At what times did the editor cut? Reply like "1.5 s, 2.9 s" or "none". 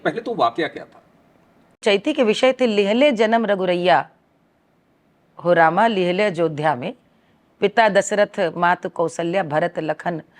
1.8 s